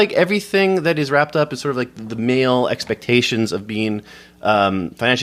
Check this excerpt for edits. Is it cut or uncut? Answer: uncut